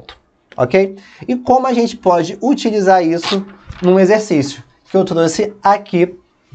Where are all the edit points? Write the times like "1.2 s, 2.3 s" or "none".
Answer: none